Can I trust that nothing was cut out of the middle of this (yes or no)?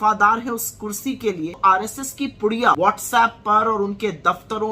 no